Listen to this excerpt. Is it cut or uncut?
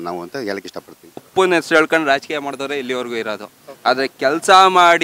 cut